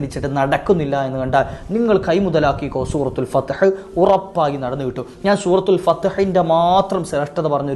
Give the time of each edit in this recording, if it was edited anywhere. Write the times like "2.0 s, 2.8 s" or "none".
none